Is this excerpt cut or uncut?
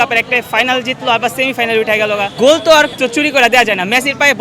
cut